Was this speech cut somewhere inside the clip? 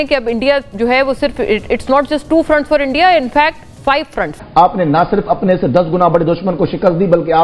no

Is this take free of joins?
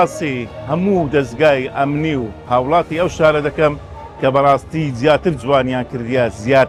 yes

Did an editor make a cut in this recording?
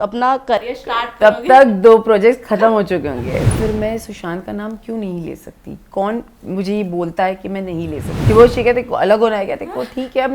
yes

